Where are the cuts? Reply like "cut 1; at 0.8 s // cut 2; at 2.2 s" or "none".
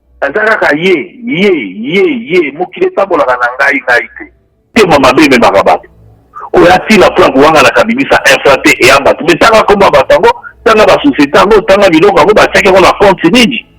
cut 1; at 4.7 s